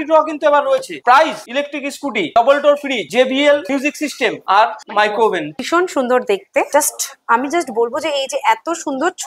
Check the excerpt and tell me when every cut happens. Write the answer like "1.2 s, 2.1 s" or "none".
1.0 s, 5.6 s, 6.7 s